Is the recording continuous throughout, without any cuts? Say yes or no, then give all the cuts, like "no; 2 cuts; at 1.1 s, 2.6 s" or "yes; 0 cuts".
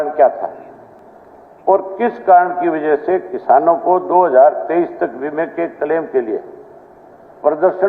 yes; 0 cuts